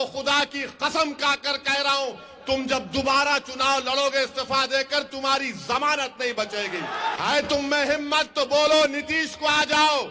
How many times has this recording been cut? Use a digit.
1